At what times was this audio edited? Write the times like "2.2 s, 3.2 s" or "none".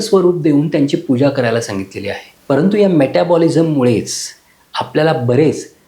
2.3 s

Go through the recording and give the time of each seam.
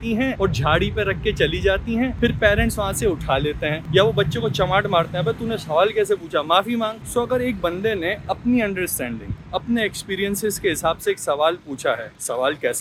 none

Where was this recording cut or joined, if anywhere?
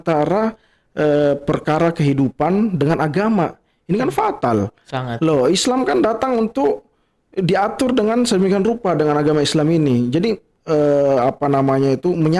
none

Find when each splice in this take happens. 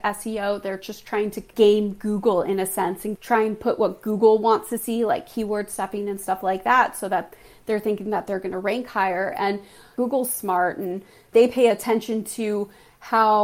1.5 s, 3.1 s, 9.9 s

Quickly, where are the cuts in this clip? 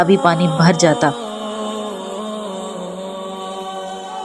none

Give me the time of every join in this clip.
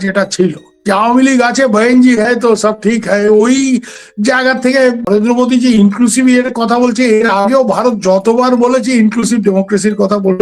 5.0 s

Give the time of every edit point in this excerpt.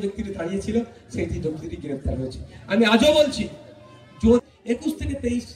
4.4 s

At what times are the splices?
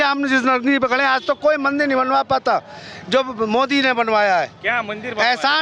none

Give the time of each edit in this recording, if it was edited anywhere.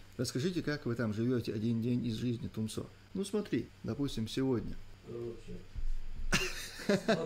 3.0 s, 3.7 s, 4.9 s

